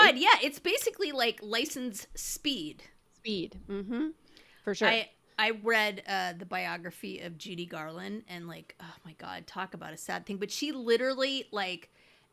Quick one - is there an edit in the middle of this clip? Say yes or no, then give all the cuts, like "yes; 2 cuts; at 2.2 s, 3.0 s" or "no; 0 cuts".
no; 0 cuts